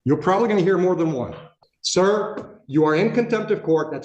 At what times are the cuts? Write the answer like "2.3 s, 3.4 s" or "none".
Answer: 1.3 s